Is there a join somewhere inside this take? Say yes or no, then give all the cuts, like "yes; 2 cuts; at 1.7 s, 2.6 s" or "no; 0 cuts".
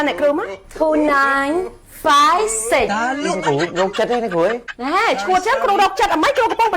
yes; 1 cut; at 4.7 s